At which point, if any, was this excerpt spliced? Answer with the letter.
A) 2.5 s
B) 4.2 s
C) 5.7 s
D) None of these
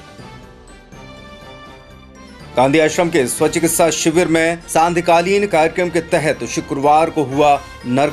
A